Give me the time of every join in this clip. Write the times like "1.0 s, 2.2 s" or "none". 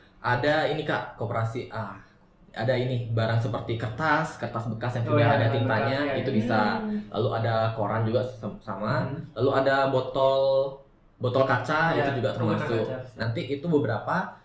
none